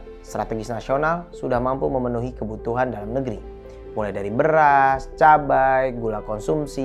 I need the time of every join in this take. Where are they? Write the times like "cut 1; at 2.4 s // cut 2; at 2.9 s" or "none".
none